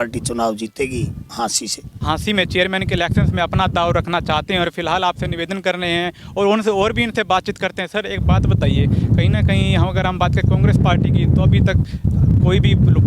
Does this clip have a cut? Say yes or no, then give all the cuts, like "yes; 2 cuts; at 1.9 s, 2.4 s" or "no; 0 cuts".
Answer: no; 0 cuts